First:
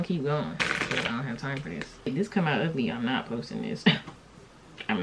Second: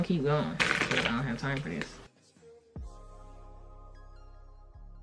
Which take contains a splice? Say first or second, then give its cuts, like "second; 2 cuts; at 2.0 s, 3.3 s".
first; 1 cut; at 1.9 s